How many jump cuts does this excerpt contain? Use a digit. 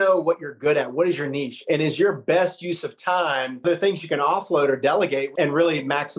2